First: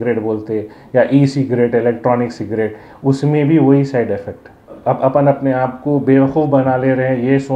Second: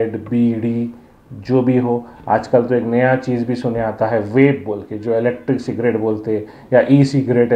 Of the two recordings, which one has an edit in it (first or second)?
first